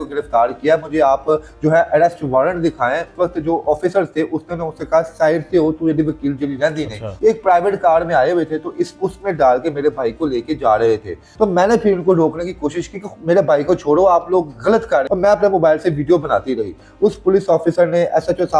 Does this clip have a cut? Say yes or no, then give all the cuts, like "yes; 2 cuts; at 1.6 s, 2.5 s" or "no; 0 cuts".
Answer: yes; 4 cuts; at 3.1 s, 7.1 s, 11.2 s, 15.0 s